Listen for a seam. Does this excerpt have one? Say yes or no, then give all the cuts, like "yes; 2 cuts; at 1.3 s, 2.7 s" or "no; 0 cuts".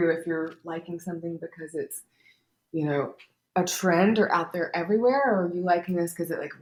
no; 0 cuts